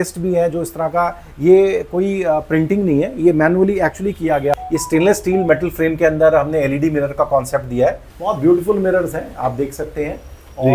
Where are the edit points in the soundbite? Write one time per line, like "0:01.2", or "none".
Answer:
0:04.5
0:08.1